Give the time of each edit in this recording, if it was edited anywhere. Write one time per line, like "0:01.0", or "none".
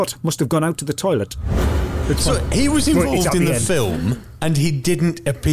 0:01.8